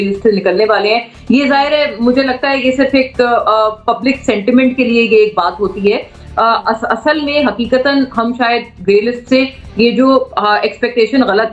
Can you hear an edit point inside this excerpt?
no; 0 cuts

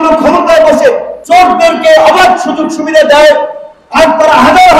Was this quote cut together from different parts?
yes; 1 cut; at 1.1 s

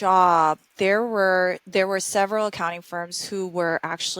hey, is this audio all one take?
no; 1 cut; at 1.6 s

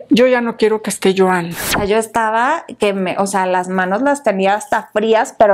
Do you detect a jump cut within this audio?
yes; 1 cut; at 1.7 s

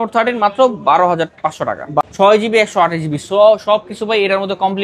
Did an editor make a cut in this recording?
yes; 1 cut; at 2.0 s

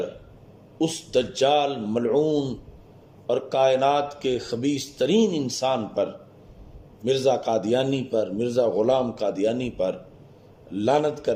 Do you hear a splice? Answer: no; 0 cuts

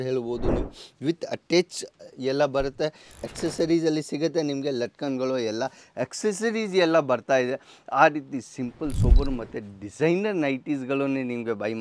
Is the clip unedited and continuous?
no; 1 cut; at 3.1 s

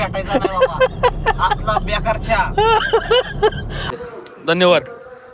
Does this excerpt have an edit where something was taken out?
yes; 1 cut; at 3.9 s

